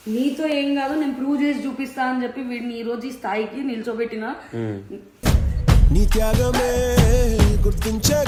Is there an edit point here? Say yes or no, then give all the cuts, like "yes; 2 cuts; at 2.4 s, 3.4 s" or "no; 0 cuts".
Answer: no; 0 cuts